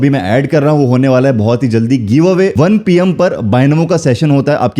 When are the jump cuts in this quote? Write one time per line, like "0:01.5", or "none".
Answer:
0:02.5